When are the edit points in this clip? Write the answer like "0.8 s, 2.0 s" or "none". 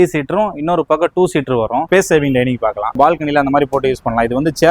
1.8 s, 3.0 s